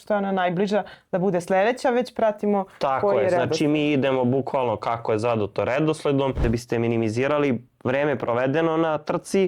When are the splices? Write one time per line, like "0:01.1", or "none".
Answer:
0:06.4